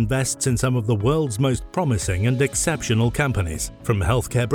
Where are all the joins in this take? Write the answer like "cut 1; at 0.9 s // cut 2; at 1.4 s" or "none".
none